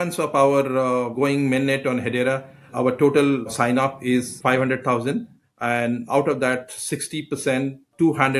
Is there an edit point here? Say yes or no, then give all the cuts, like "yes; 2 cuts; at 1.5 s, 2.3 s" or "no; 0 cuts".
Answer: no; 0 cuts